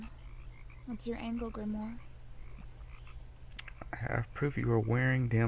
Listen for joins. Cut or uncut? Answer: cut